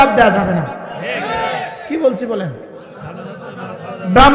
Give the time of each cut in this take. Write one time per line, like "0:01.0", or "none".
none